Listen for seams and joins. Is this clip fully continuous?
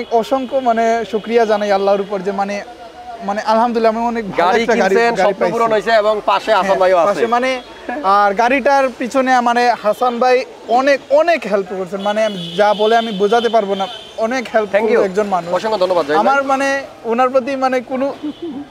yes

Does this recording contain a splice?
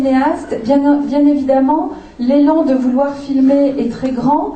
no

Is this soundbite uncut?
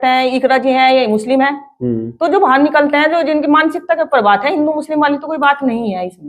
yes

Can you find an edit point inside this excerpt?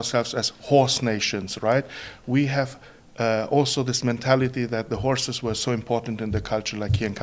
no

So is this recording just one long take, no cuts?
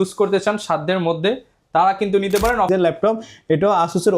no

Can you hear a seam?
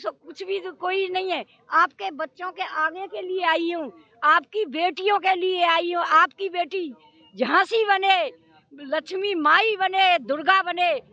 no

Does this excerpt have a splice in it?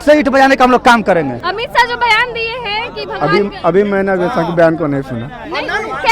no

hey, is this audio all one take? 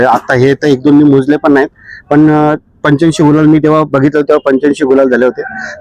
yes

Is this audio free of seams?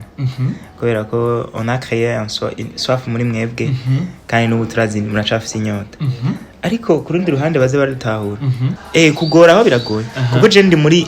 no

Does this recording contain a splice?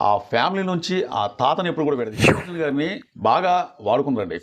yes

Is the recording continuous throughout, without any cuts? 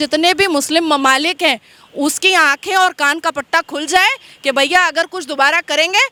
yes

